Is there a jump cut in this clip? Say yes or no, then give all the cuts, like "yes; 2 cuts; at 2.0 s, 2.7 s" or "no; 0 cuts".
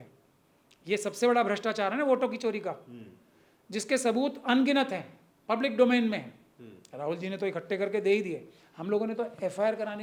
no; 0 cuts